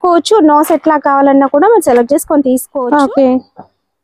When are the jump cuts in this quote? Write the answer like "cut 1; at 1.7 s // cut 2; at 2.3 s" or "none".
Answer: cut 1; at 2.7 s

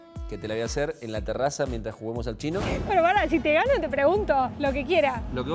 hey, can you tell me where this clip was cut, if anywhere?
cut 1; at 2.7 s // cut 2; at 4.5 s

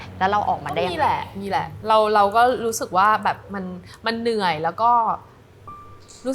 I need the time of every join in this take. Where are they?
none

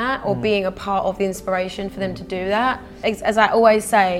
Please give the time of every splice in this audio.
cut 1; at 2.9 s

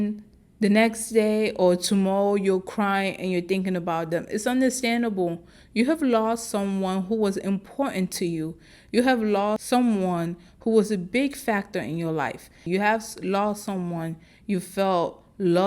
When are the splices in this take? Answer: cut 1; at 9.6 s // cut 2; at 12.6 s

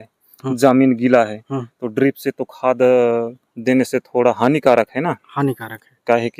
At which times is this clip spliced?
none

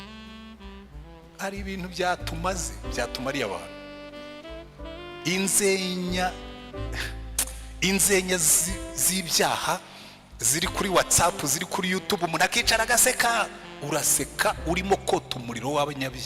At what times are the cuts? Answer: cut 1; at 1.3 s

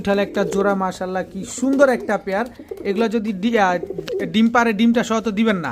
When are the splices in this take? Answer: none

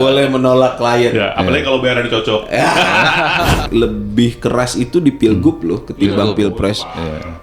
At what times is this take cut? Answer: cut 1; at 3.7 s

